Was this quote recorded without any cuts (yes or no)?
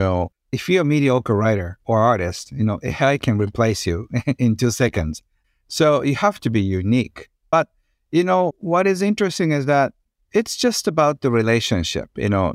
yes